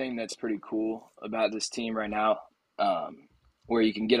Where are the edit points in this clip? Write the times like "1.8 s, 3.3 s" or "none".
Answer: none